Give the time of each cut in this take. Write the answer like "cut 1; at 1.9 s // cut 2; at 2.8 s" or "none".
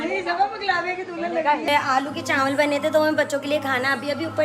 cut 1; at 1.7 s